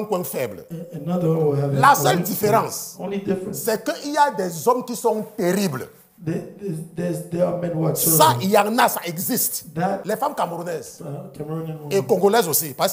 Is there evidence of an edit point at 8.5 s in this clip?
no; 1 cut; at 10.0 s

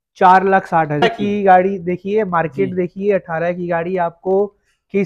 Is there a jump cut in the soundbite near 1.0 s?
yes; 1 cut; at 1.0 s

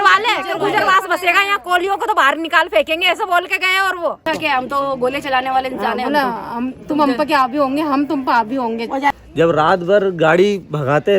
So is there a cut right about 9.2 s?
yes; 2 cuts; at 4.2 s, 9.2 s

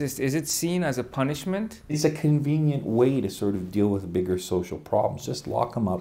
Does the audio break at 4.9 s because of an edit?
no; 1 cut; at 2.0 s

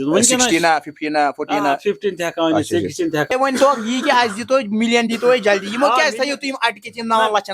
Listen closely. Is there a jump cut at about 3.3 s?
yes; 1 cut; at 3.3 s

